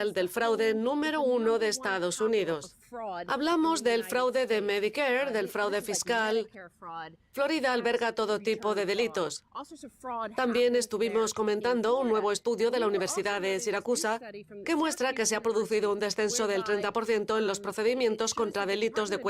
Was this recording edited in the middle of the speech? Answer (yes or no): yes